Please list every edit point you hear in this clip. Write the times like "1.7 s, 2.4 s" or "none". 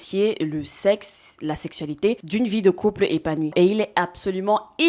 3.5 s

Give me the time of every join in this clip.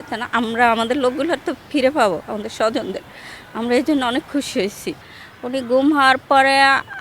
5.0 s

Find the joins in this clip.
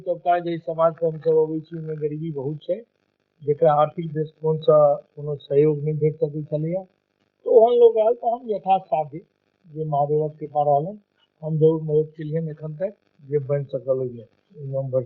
13.1 s

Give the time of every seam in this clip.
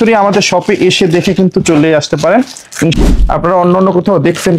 3.0 s

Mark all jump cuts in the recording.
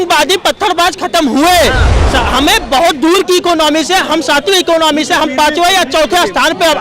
1.9 s

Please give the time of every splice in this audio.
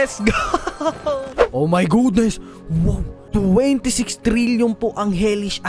1.4 s, 3.1 s

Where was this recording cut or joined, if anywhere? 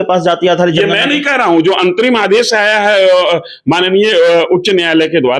none

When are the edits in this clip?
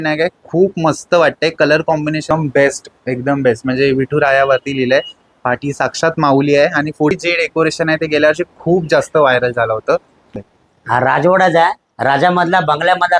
2.3 s, 7.1 s, 10.3 s

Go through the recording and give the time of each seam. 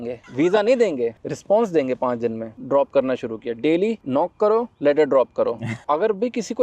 2.5 s, 5.7 s

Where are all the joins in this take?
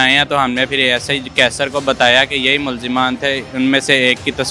none

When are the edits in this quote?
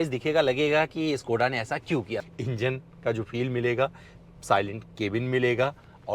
2.2 s

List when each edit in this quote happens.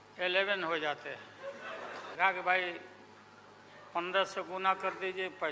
2.2 s

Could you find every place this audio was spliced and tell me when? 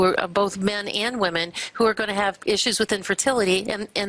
none

